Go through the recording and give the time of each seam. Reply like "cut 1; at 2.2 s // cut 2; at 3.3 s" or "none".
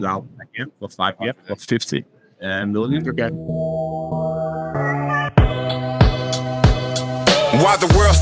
cut 1; at 3.4 s

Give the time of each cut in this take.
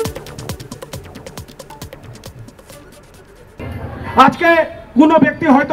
cut 1; at 3.5 s

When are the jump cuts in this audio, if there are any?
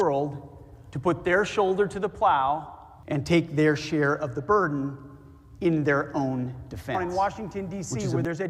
cut 1; at 7.0 s

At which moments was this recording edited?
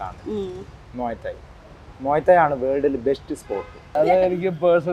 cut 1; at 4.0 s

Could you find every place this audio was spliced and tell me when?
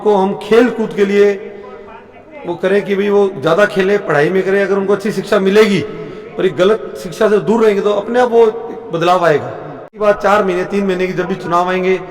cut 1; at 10.0 s

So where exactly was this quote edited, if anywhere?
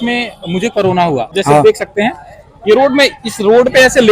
cut 1; at 1.4 s

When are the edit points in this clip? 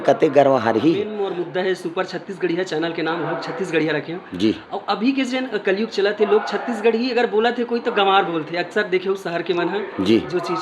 cut 1; at 1.2 s

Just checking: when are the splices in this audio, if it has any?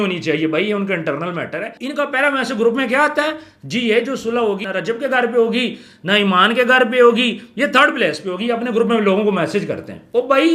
cut 1; at 1.8 s // cut 2; at 4.6 s

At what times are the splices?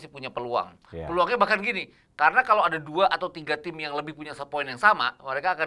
none

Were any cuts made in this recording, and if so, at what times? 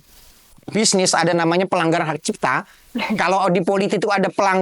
none

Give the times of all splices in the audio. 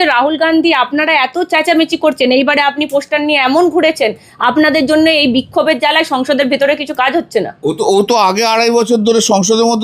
none

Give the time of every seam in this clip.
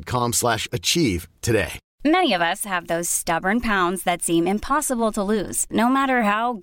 cut 1; at 1.8 s

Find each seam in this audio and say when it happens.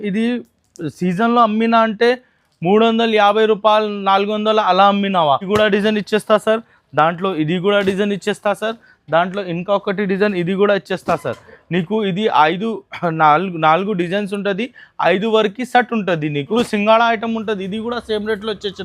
cut 1; at 5.5 s // cut 2; at 16.6 s

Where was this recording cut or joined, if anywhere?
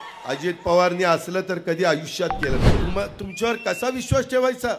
cut 1; at 2.8 s

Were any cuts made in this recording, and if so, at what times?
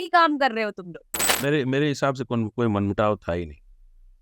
cut 1; at 1.2 s

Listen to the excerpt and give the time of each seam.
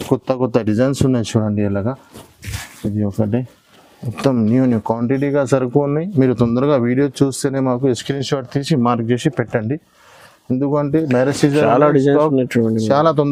none

